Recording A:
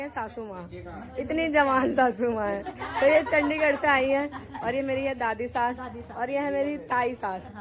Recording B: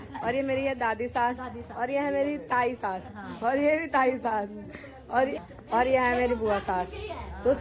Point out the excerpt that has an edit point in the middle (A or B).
B